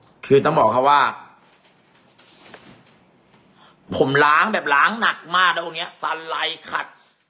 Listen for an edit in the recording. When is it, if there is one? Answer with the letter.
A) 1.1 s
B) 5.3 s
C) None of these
C